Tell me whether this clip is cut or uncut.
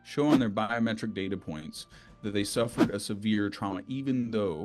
uncut